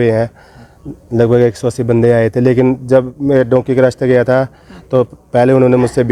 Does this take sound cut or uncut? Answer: uncut